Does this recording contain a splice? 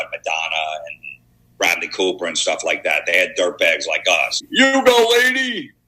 yes; 1 cut; at 4.5 s

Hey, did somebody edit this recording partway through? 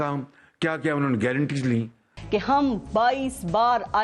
yes; 1 cut; at 2.1 s

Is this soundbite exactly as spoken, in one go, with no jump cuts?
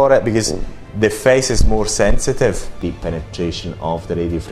no; 1 cut; at 2.8 s

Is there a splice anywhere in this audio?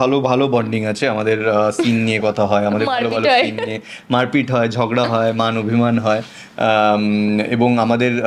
no; 0 cuts

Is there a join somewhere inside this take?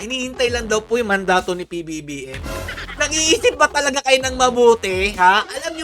yes; 1 cut; at 2.8 s

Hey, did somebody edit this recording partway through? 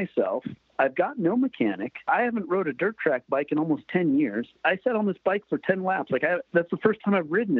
yes; 3 cuts; at 2.0 s, 4.6 s, 6.4 s

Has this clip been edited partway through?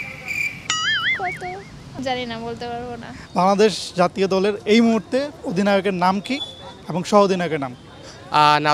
yes; 1 cut; at 3.2 s

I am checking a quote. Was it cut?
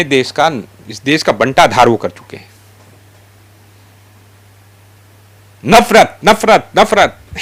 no; 0 cuts

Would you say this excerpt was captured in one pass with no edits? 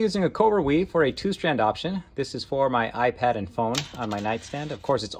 yes; 0 cuts

